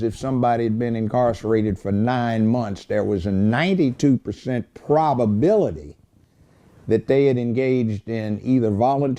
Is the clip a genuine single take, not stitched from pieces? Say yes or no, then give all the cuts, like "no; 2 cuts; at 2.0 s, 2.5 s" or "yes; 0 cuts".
no; 1 cut; at 1.0 s